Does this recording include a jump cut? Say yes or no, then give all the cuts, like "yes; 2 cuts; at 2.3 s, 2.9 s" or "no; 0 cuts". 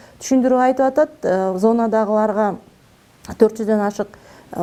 no; 0 cuts